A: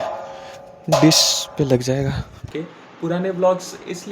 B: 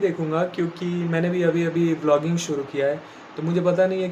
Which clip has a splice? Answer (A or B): A